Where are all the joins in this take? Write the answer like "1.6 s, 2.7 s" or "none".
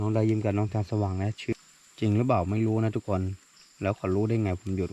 1.5 s